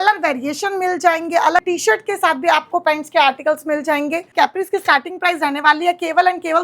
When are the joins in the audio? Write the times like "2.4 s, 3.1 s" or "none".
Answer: 1.6 s, 4.3 s